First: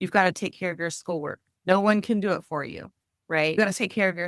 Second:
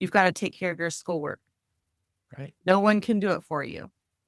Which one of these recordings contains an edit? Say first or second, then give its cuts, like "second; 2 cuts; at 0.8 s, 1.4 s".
first; 2 cuts; at 1.4 s, 3.6 s